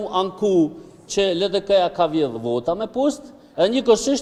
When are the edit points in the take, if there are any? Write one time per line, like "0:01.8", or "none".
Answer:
none